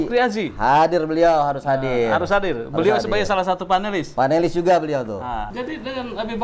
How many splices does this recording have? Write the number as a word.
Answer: one